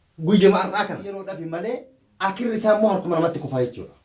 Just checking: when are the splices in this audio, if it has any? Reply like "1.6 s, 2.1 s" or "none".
1.3 s